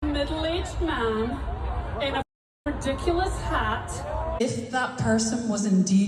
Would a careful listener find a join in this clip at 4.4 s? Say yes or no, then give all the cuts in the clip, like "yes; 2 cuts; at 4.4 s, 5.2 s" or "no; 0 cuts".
yes; 1 cut; at 4.4 s